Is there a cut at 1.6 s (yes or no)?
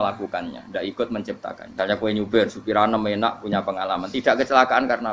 yes